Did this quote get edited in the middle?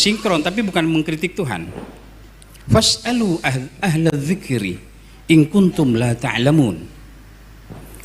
no; 0 cuts

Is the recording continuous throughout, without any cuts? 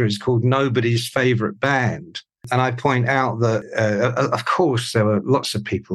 no; 1 cut; at 2.4 s

